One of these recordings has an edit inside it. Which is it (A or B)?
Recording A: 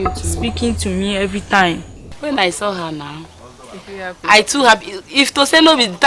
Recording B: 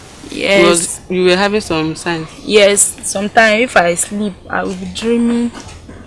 A